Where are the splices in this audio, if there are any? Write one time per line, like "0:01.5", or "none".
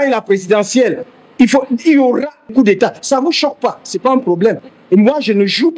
0:02.5
0:04.7